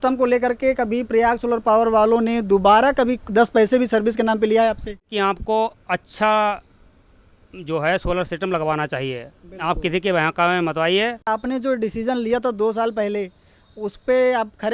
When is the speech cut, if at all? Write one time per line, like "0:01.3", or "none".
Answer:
0:05.0
0:11.3